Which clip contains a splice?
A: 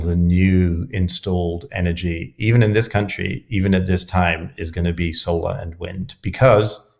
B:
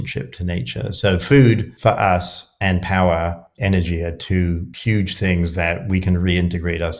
B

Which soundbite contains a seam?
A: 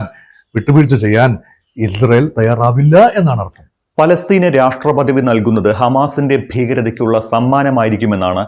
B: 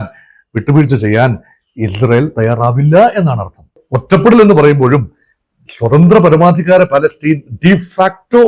B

